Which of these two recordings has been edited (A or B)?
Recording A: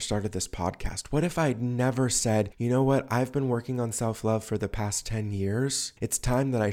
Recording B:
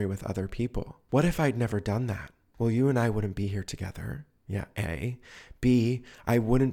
B